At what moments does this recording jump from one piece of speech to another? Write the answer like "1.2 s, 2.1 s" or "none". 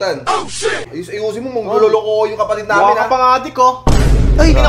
1.0 s